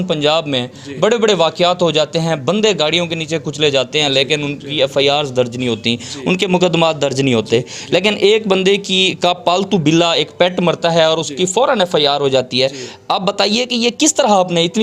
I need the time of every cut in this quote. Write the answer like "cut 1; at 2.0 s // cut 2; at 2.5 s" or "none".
none